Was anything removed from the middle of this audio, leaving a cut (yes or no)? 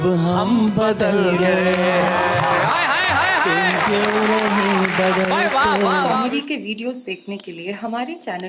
yes